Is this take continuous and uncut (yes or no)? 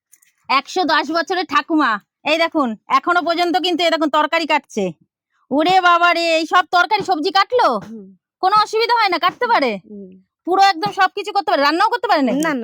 yes